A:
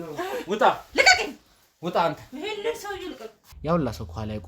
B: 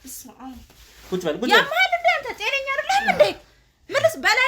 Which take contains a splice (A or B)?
A